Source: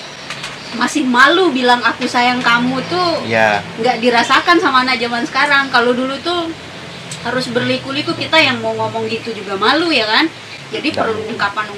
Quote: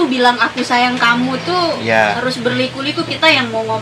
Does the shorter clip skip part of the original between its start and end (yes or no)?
yes